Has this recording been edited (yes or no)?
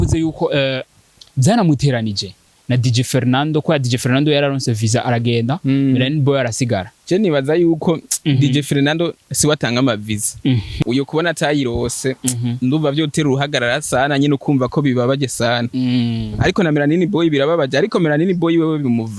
yes